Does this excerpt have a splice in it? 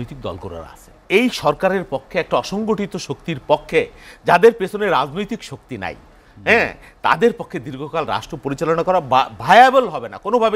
yes; 1 cut; at 1.0 s

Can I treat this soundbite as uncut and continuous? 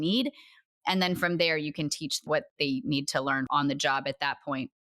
no; 2 cuts; at 2.2 s, 3.5 s

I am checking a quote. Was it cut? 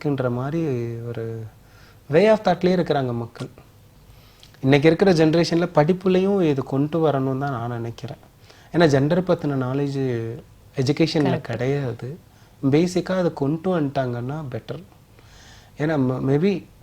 no; 0 cuts

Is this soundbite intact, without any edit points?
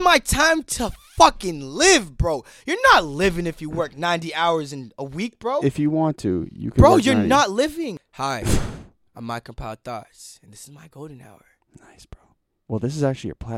no; 1 cut; at 8.1 s

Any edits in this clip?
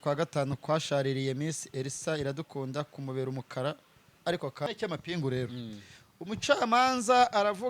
yes; 1 cut; at 4.7 s

